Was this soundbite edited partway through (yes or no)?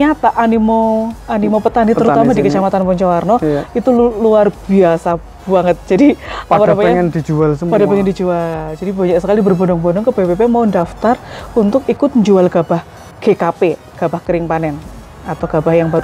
no